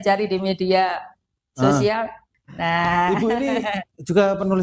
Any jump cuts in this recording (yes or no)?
yes